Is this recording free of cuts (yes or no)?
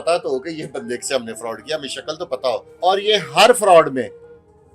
no